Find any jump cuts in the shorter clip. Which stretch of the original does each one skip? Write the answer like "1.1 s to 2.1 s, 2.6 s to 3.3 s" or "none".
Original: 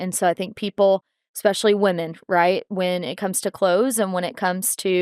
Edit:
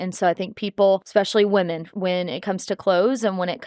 1.1 s to 1.3 s, 2.2 s to 2.7 s